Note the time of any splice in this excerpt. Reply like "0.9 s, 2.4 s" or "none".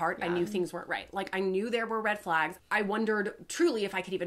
2.6 s